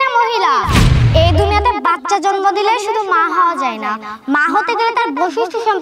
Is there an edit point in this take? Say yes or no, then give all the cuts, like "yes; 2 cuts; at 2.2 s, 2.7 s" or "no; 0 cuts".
no; 0 cuts